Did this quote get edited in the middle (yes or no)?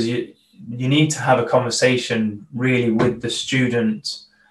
no